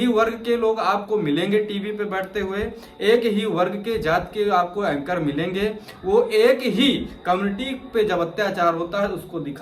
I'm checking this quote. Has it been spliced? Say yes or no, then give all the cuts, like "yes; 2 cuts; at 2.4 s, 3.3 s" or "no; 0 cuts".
no; 0 cuts